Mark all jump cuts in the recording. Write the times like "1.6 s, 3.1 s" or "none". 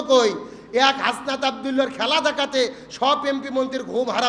none